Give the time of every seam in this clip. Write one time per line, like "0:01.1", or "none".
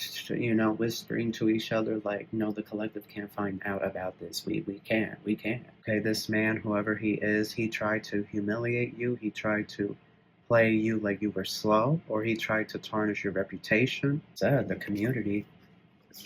0:05.9
0:14.3